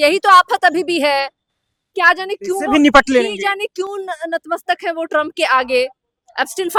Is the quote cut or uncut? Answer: uncut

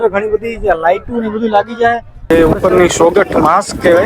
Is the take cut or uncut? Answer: cut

